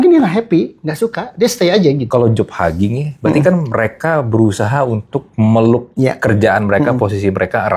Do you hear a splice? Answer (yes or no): yes